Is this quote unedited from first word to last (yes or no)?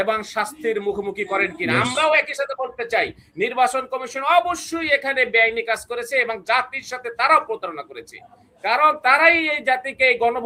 yes